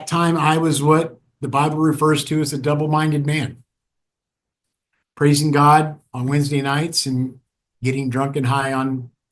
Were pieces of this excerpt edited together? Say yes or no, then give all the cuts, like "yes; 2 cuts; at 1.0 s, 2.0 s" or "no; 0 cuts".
no; 0 cuts